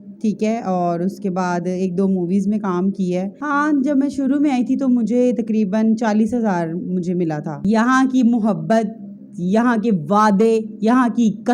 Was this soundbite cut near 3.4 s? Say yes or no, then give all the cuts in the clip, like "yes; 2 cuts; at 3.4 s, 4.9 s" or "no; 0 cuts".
yes; 2 cuts; at 3.4 s, 7.5 s